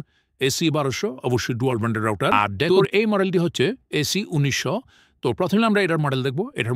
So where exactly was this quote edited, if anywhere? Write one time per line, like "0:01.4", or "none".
0:02.6